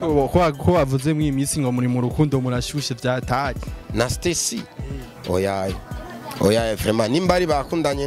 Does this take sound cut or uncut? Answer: uncut